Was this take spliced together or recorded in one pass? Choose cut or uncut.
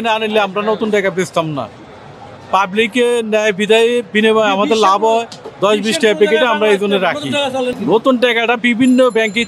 uncut